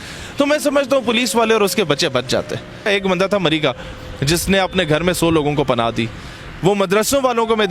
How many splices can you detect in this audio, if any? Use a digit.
1